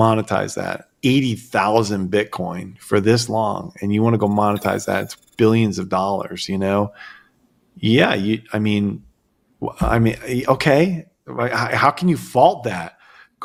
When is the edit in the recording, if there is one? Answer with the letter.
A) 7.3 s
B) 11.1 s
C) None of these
C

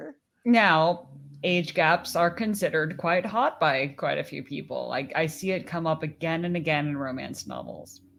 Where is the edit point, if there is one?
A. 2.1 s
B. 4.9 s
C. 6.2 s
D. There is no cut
D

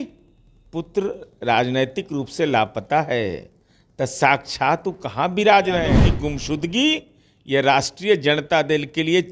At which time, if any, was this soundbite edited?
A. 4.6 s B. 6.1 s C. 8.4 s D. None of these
B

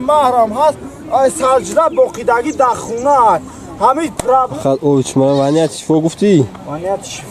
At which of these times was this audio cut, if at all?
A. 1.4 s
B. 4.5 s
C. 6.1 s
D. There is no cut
B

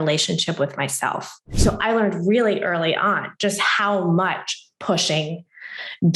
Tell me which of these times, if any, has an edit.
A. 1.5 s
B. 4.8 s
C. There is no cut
A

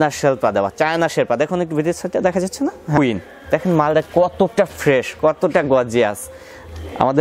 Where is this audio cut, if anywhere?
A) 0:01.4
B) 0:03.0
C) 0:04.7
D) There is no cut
B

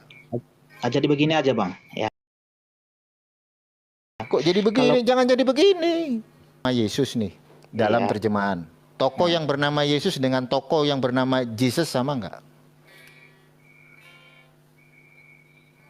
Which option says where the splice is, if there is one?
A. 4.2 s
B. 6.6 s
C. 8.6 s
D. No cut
B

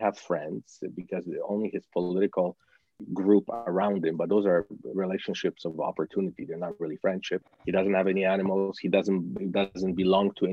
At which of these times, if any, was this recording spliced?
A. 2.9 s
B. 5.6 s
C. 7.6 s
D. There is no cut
D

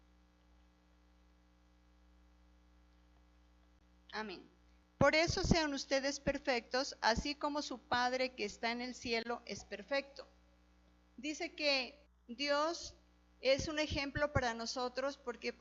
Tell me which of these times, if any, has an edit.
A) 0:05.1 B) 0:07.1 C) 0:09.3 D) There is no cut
D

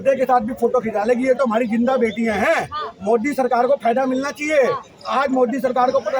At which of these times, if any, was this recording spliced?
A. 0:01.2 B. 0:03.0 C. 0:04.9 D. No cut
D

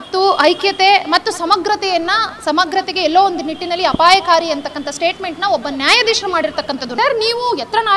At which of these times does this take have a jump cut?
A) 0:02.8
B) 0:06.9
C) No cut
B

